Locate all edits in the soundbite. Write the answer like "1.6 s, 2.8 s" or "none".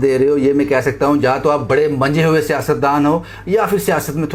none